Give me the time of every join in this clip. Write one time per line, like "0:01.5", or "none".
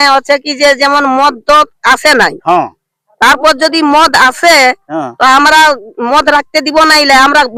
none